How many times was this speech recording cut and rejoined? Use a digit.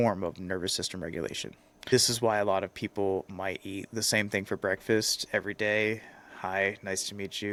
0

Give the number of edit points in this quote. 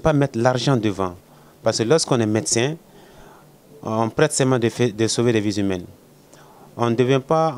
0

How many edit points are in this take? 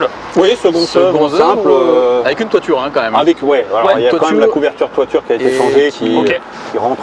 0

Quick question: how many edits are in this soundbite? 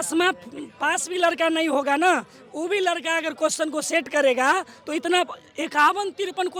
0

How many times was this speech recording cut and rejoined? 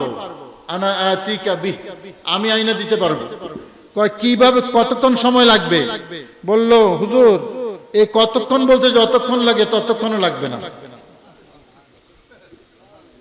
0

